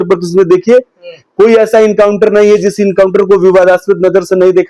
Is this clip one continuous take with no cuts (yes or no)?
yes